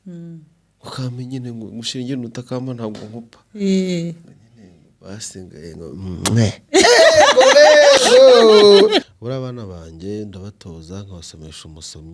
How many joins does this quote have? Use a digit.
1